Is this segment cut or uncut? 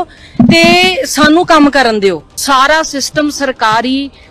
cut